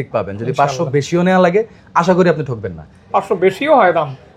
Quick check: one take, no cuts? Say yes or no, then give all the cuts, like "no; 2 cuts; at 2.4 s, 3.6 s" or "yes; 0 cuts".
no; 1 cut; at 2.9 s